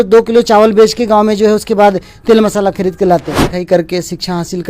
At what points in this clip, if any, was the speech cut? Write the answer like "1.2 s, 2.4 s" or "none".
3.5 s